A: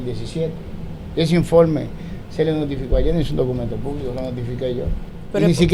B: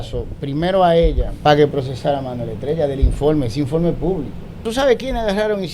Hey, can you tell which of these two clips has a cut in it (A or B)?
B